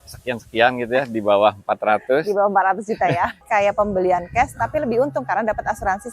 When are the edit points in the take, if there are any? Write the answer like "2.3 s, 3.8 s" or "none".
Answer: 3.4 s